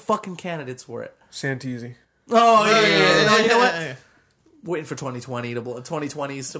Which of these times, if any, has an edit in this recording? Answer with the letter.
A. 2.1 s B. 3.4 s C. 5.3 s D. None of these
D